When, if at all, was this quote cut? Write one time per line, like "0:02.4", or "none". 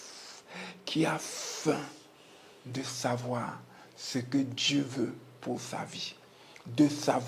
none